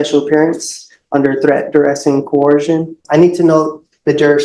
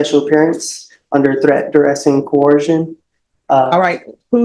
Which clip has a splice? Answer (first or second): first